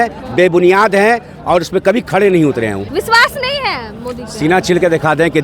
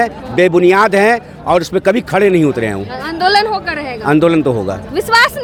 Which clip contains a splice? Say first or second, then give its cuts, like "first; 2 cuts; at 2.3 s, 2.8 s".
first; 1 cut; at 2.8 s